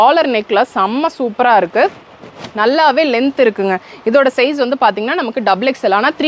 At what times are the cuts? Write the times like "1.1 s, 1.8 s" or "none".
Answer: none